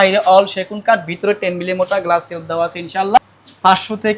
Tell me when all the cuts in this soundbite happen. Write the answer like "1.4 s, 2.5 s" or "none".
3.2 s